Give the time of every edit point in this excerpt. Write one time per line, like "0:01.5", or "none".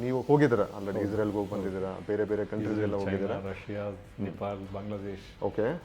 none